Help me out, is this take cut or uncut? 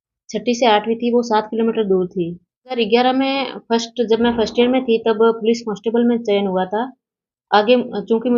cut